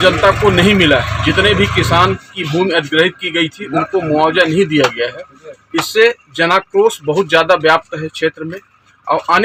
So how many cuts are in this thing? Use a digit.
0